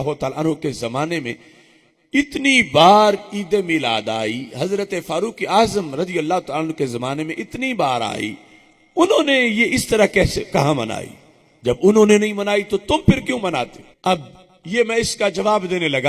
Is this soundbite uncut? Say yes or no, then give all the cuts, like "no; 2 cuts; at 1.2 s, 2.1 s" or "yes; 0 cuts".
no; 1 cut; at 13.8 s